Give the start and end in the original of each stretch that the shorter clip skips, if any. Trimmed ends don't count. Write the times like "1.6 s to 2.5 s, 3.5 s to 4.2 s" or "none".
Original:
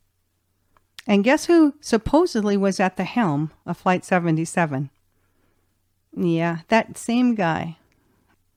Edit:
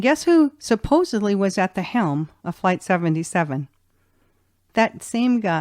5.9 s to 6.6 s